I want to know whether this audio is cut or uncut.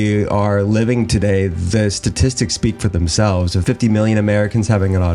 cut